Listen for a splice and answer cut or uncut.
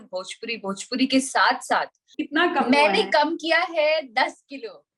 cut